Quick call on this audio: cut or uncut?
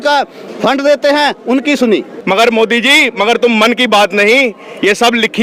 cut